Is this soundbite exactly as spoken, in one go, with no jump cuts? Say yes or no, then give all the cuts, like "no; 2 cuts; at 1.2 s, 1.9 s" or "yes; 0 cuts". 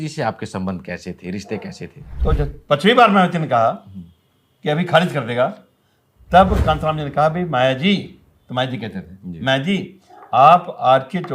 no; 1 cut; at 2.0 s